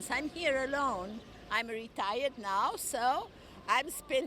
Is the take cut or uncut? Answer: uncut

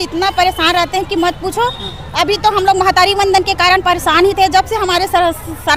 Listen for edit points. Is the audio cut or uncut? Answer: uncut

